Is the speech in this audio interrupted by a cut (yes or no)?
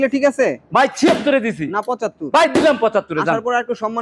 no